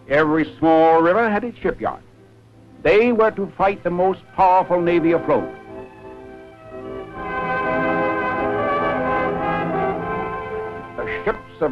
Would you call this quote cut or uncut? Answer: uncut